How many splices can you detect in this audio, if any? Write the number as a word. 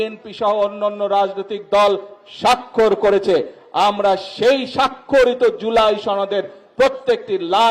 zero